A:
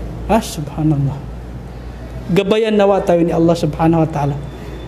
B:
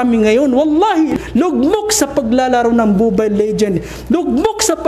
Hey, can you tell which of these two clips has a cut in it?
B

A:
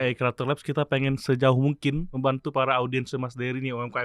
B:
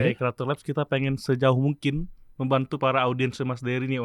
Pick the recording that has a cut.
A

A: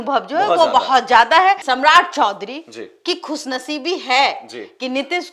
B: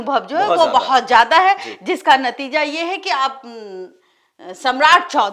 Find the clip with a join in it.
A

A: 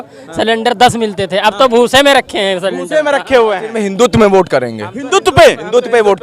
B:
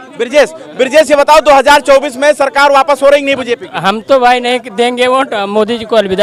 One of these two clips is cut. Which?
A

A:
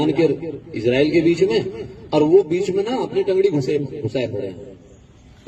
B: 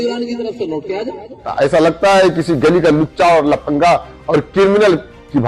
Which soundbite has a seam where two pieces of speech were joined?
B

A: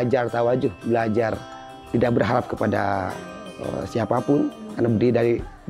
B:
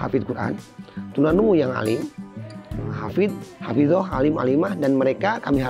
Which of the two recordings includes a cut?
A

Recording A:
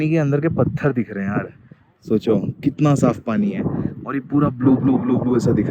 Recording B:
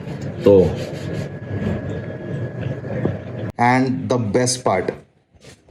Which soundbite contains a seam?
B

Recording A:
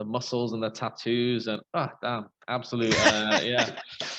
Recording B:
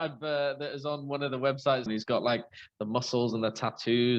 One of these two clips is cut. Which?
B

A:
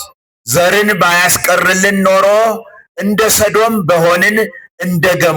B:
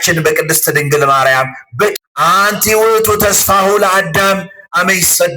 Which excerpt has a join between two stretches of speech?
B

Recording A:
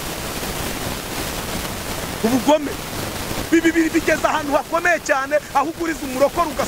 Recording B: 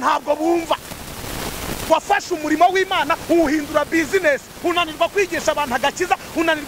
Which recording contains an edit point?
B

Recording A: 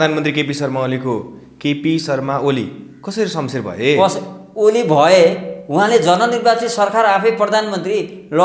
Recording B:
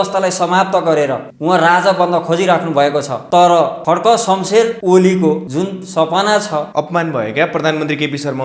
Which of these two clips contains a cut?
B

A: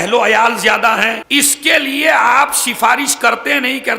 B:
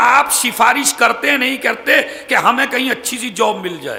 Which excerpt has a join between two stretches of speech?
A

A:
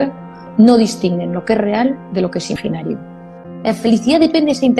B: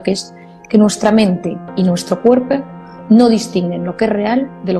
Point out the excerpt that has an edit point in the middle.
A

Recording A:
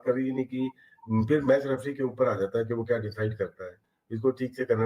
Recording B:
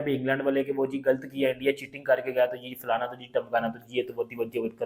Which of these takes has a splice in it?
A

